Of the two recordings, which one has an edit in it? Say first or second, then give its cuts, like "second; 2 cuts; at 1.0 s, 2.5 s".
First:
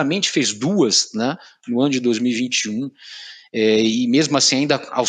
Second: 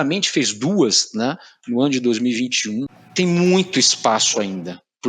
second; 1 cut; at 3.0 s